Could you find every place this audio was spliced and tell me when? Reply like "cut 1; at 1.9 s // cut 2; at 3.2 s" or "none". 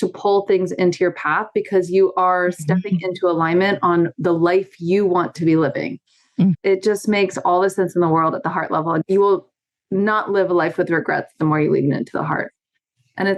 cut 1; at 6.6 s